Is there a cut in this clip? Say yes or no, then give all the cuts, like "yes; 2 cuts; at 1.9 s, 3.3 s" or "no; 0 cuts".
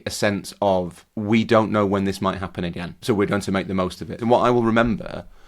yes; 3 cuts; at 1.0 s, 2.9 s, 4.2 s